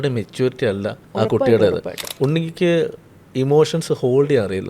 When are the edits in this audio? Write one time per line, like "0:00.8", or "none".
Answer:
0:01.0
0:02.0